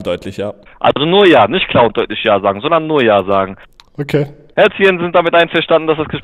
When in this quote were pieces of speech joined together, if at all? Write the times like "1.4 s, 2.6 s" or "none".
4.4 s